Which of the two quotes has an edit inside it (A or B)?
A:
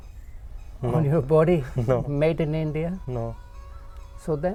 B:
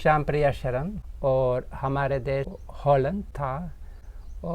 B